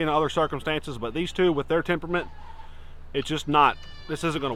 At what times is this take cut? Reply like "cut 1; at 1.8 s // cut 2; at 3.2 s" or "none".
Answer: none